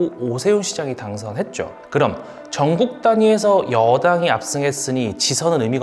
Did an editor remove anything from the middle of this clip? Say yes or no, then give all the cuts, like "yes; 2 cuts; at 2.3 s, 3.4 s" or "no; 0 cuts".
no; 0 cuts